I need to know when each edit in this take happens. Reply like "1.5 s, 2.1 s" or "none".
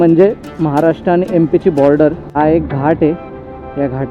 2.3 s